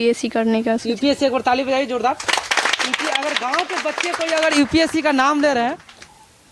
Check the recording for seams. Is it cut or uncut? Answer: uncut